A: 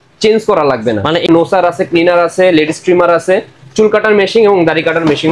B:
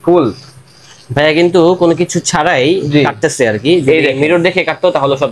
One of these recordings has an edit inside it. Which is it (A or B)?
A